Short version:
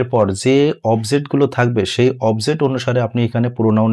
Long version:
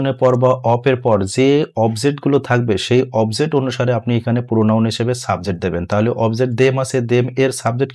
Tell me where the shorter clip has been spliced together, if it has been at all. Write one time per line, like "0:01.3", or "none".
none